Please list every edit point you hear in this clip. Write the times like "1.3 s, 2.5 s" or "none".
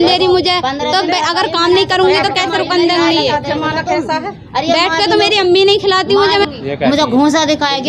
6.5 s